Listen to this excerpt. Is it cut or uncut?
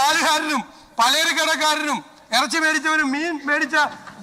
uncut